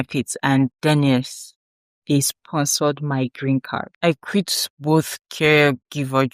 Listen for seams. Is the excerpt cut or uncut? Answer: cut